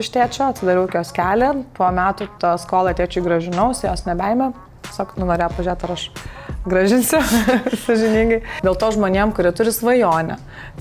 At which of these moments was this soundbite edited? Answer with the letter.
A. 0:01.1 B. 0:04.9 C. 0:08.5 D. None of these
C